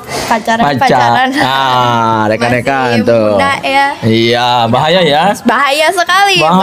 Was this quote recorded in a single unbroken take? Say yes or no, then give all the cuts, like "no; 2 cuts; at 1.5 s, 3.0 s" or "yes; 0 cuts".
yes; 0 cuts